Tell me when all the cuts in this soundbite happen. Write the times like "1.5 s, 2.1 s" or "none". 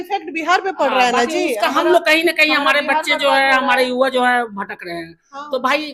none